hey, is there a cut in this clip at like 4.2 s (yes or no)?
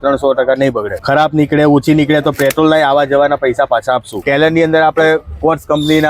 yes